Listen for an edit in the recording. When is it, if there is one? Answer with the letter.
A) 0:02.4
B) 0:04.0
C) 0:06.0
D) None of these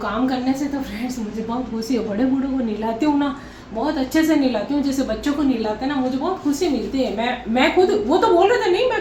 D